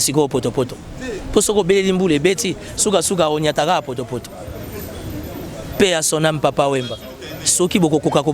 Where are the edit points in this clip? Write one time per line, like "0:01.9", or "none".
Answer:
none